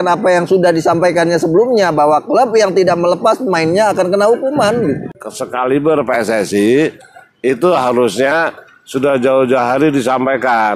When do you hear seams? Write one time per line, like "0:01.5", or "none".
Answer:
0:05.2